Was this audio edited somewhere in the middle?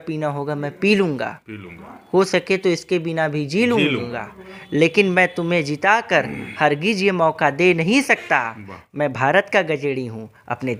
no; 0 cuts

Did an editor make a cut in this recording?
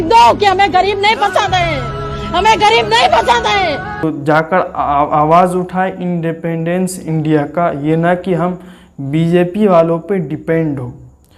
yes; 1 cut; at 4.0 s

